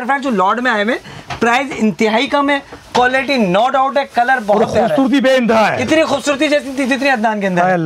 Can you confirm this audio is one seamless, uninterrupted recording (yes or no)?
yes